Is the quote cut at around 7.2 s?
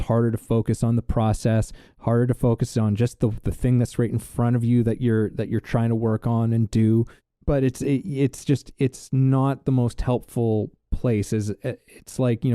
yes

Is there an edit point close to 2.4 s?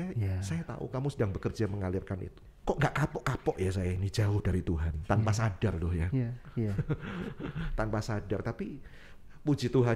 yes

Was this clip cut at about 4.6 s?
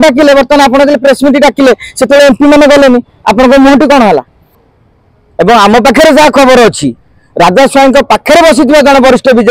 yes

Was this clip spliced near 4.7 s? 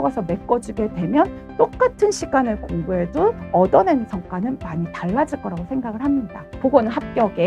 no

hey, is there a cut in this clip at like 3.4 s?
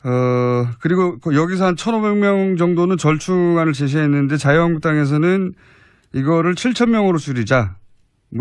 yes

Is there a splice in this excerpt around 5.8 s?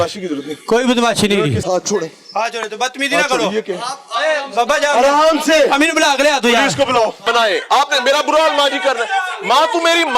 no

